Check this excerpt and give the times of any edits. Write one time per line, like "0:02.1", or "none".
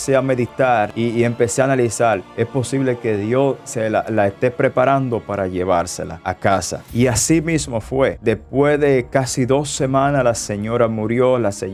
none

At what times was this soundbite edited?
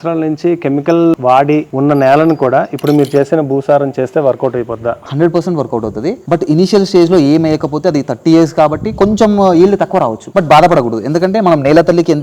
0:01.3
0:06.2
0:10.2

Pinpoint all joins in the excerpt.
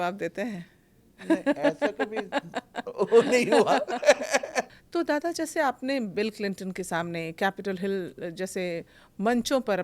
0:04.8

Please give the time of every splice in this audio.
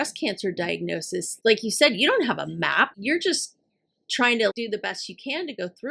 0:01.3
0:02.9
0:04.5

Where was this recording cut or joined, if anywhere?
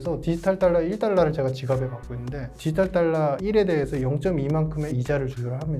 0:02.5
0:03.4
0:04.9

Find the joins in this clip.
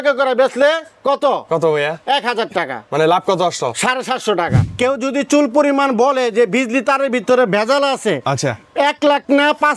0:04.6

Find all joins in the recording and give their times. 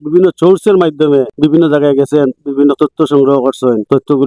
none

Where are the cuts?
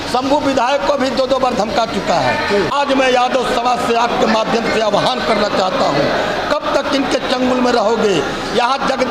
0:02.7

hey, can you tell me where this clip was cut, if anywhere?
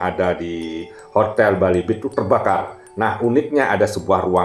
none

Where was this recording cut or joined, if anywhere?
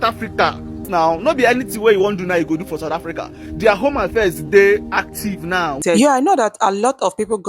0:00.9
0:05.8

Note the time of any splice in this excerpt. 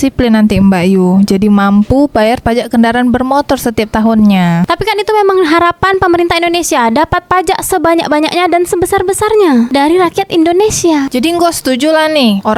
0:11.1

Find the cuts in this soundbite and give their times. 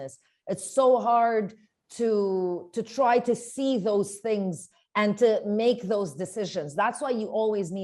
none

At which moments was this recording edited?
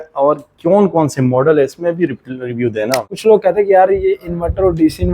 0:03.1

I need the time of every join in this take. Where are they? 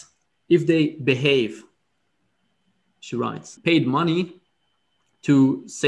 0:03.5

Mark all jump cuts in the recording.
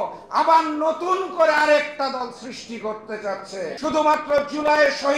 0:03.8

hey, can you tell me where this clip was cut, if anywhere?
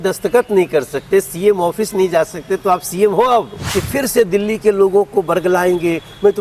0:03.6

